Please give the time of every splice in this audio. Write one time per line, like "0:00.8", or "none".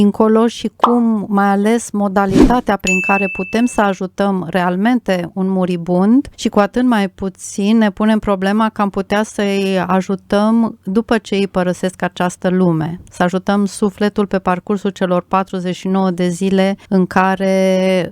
0:06.4
0:16.8

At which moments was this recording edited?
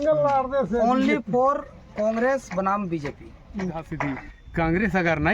0:04.0

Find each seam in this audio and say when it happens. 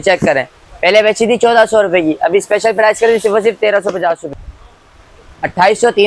0:04.2

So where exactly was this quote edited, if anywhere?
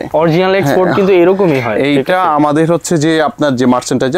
none

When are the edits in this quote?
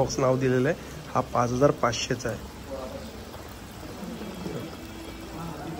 none

